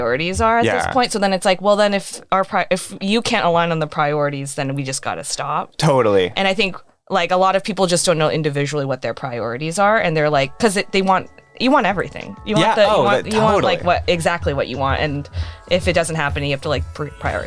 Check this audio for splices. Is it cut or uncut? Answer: uncut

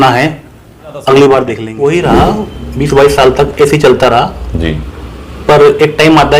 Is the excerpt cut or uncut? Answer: cut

